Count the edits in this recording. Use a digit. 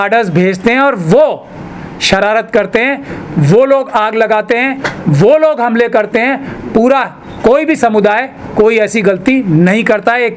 0